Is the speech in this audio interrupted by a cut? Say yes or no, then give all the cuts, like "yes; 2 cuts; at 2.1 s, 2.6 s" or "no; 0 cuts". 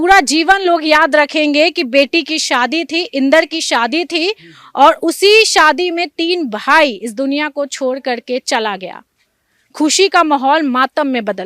no; 0 cuts